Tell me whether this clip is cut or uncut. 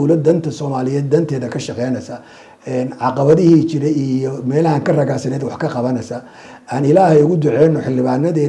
uncut